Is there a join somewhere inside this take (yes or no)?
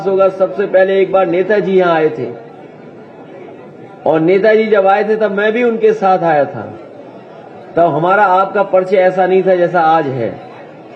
no